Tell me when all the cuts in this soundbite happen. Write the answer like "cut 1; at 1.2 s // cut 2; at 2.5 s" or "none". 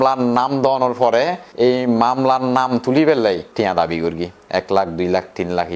cut 1; at 1.4 s // cut 2; at 3.5 s